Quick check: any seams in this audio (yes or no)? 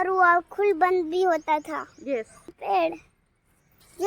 yes